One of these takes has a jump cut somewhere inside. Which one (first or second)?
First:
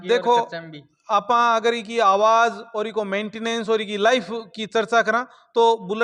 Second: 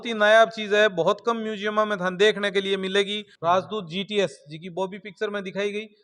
second